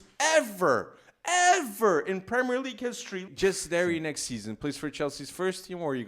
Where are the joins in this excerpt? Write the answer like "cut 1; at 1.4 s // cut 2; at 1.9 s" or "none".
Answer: cut 1; at 3.3 s